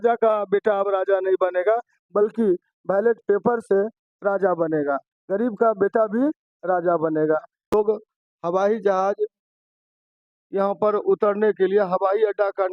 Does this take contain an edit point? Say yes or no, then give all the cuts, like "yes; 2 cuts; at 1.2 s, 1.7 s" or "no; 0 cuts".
yes; 1 cut; at 7.7 s